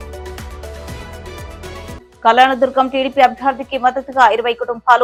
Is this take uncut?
yes; 0 cuts

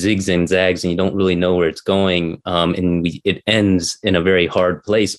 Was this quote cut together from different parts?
no; 0 cuts

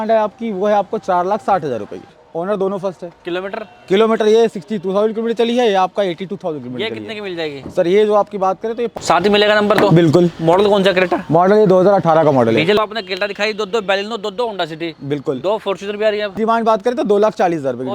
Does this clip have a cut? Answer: yes; 4 cuts; at 2.1 s, 9.0 s, 12.8 s, 16.4 s

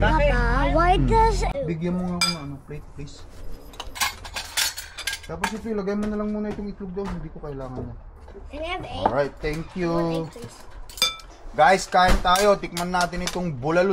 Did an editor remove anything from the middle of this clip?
yes; 2 cuts; at 1.5 s, 4.0 s

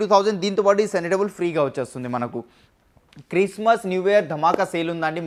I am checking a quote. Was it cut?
no; 0 cuts

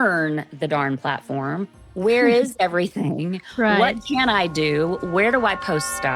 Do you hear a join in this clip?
no; 0 cuts

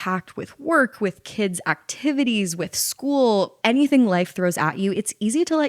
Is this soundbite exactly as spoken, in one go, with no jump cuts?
no; 1 cut; at 3.5 s

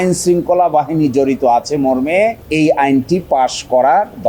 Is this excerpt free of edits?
yes; 0 cuts

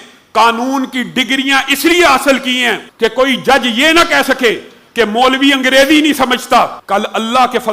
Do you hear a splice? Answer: yes; 2 cuts; at 2.8 s, 6.8 s

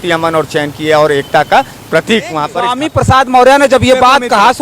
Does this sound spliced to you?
yes; 1 cut; at 2.8 s

